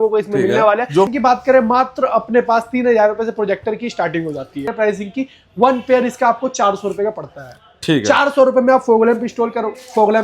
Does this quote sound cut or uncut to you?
cut